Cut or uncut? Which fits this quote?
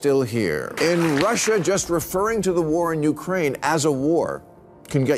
cut